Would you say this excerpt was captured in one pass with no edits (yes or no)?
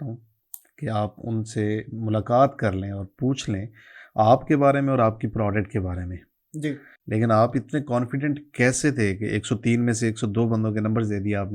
no